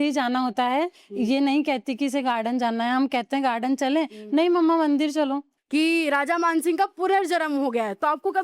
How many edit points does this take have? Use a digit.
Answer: 1